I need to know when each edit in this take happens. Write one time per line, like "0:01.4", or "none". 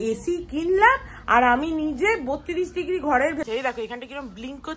0:03.5